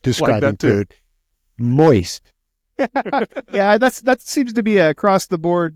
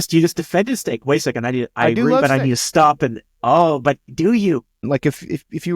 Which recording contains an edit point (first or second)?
second